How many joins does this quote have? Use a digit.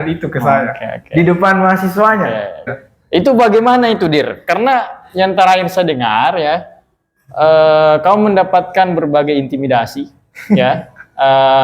1